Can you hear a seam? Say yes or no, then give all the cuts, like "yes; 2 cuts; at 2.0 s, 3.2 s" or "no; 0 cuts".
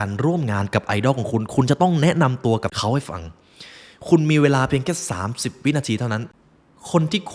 yes; 2 cuts; at 2.7 s, 6.3 s